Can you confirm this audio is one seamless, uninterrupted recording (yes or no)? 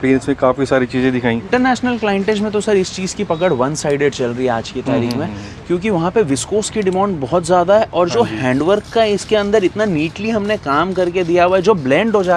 no